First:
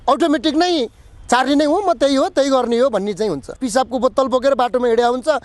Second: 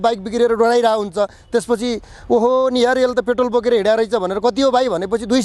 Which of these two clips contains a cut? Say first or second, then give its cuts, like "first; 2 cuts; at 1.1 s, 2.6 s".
first; 1 cut; at 3.6 s